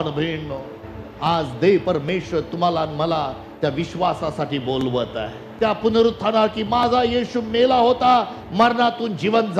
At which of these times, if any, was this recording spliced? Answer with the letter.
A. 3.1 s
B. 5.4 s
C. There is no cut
B